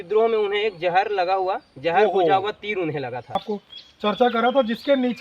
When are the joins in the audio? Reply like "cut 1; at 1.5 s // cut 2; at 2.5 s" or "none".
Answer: cut 1; at 3.4 s